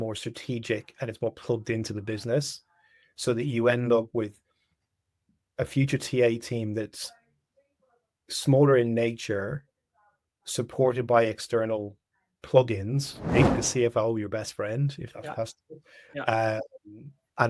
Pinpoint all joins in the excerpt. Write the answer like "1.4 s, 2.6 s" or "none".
13.2 s

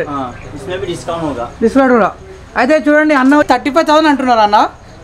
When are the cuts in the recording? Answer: 3.5 s

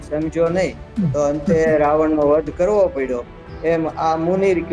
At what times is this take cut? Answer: none

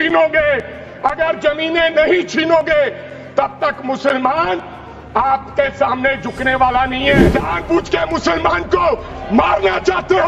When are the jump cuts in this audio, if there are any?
7.3 s

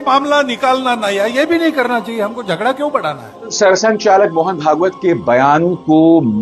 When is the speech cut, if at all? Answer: 3.5 s

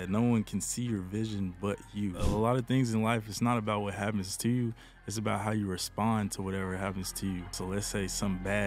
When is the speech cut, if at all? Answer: 2.2 s, 7.6 s

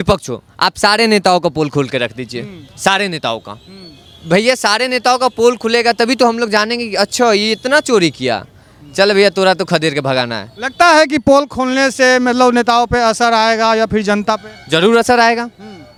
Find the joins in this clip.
none

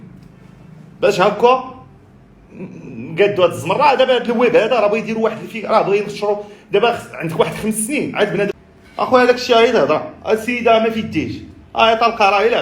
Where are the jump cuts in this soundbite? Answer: 8.6 s

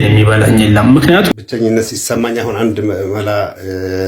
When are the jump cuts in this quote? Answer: 1.3 s

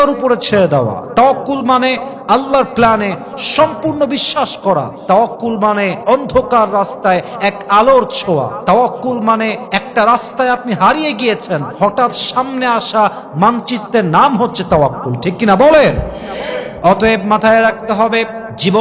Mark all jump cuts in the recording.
none

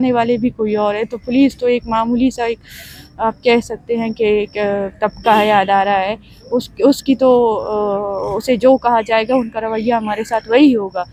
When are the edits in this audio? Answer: none

